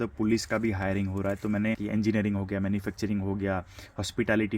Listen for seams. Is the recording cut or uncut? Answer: cut